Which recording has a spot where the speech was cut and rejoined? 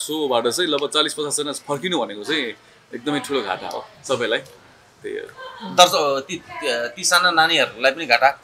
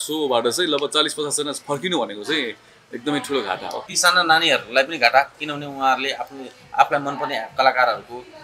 second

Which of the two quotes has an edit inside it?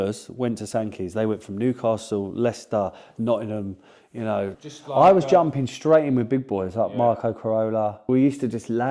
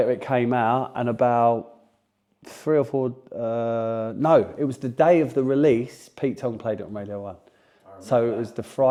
first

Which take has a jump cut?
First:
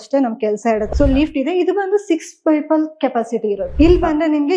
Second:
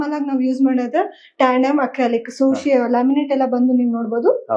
first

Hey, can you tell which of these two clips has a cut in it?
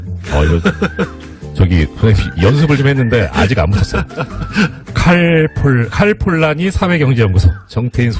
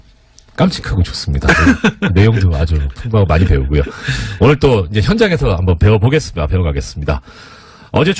second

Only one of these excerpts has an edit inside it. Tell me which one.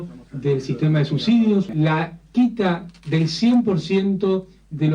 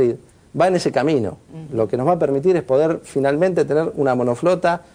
first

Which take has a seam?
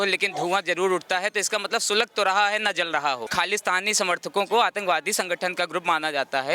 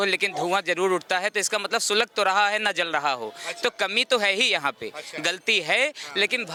first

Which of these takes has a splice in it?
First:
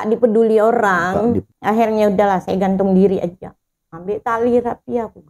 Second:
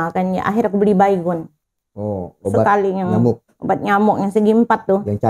first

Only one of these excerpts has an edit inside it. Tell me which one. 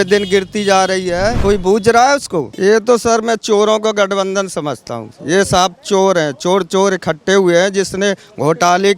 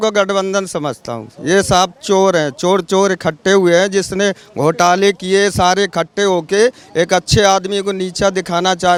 first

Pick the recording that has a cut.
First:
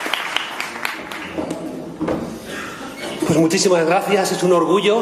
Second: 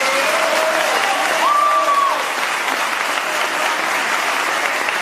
second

